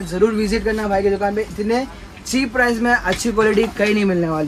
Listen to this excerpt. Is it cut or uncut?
uncut